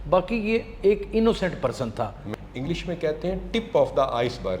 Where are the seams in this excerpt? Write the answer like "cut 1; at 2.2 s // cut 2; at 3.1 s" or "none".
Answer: cut 1; at 2.2 s